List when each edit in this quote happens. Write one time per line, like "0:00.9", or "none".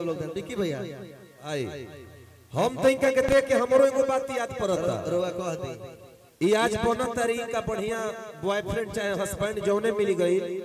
none